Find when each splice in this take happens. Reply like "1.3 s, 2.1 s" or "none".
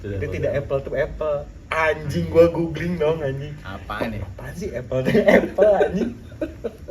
none